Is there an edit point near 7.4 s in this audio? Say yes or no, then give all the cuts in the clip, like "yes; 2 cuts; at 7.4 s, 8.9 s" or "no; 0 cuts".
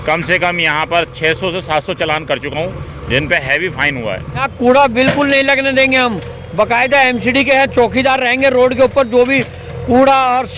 no; 1 cut; at 4.5 s